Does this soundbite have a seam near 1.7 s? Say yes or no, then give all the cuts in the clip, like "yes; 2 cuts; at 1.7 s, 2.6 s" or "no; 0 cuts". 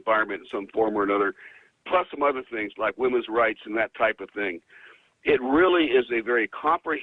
yes; 1 cut; at 1.7 s